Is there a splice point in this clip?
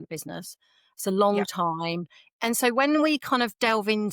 yes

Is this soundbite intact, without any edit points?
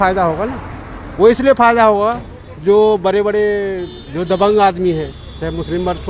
yes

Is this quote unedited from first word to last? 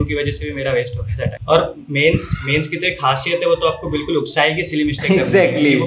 no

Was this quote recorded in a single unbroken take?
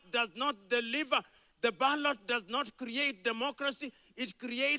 yes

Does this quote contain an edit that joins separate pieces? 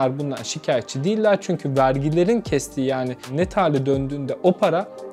yes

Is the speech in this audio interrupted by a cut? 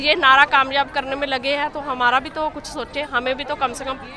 no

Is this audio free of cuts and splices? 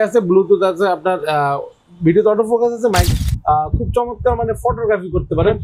no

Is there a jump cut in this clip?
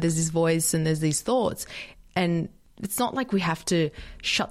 no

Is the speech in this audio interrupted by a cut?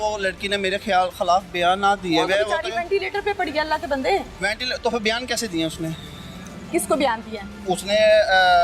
no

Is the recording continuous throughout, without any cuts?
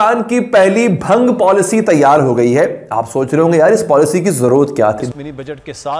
yes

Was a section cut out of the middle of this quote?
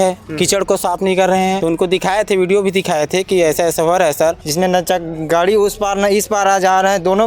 yes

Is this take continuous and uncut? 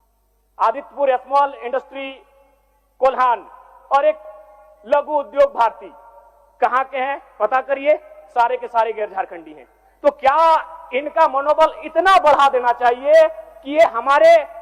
yes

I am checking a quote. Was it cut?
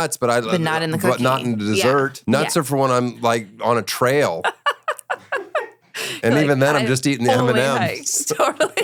no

